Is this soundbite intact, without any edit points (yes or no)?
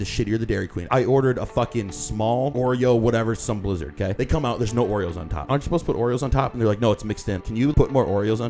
no